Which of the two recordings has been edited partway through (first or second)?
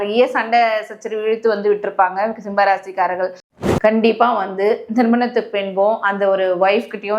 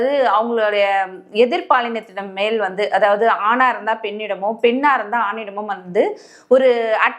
first